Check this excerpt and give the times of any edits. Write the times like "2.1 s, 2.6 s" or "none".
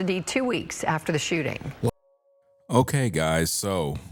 none